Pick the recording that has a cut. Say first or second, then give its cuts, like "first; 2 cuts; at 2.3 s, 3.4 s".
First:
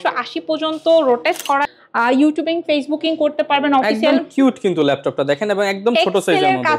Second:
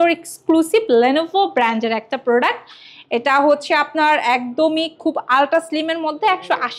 first; 1 cut; at 1.7 s